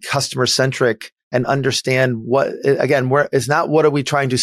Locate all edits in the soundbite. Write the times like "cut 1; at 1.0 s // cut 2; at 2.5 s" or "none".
none